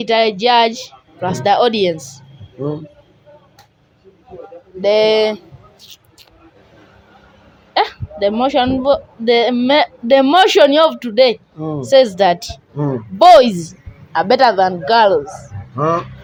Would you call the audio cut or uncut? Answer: uncut